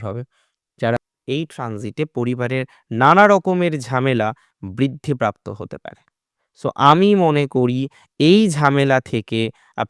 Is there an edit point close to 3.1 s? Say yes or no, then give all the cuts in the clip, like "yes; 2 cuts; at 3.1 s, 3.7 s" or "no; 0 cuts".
no; 1 cut; at 1.0 s